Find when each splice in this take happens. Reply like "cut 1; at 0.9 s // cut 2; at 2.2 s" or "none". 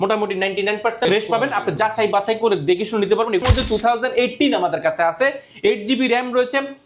cut 1; at 1.1 s // cut 2; at 3.4 s